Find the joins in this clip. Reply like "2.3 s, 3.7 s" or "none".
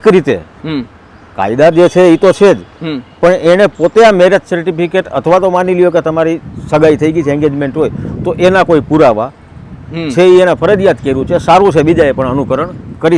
none